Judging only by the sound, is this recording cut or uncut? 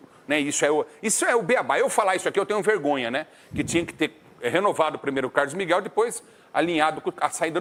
uncut